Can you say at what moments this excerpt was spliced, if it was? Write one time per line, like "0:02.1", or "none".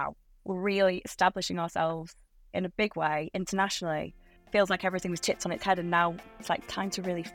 0:04.3
0:06.4